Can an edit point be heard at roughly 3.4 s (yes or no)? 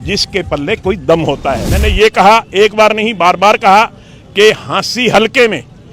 no